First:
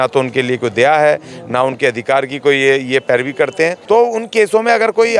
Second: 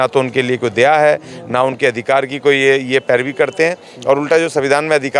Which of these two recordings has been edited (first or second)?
first